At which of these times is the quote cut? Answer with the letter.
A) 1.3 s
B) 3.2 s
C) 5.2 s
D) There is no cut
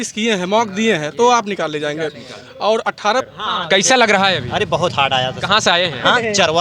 B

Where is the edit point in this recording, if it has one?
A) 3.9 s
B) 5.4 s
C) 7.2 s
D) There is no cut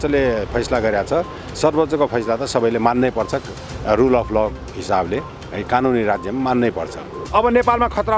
C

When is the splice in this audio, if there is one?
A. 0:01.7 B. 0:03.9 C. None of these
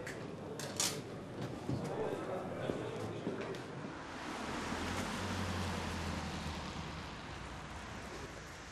B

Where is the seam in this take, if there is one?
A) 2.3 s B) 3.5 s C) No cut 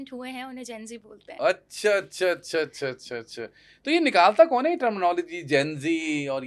C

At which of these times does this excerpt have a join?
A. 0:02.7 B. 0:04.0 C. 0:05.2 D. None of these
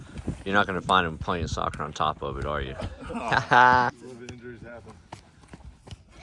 B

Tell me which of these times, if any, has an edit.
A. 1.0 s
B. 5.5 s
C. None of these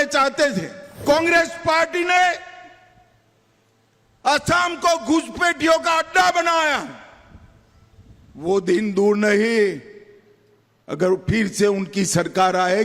A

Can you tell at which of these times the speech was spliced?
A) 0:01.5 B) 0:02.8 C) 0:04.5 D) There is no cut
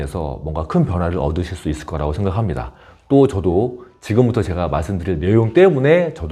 D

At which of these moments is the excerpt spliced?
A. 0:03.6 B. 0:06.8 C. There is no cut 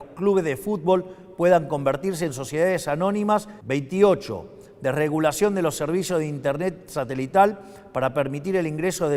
A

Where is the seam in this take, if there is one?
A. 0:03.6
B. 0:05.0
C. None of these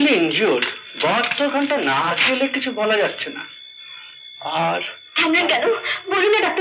C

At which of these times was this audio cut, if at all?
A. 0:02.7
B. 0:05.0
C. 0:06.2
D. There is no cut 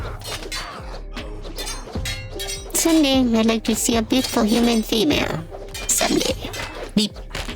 A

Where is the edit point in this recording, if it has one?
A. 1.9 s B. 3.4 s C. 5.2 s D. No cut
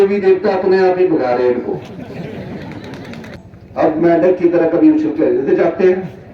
B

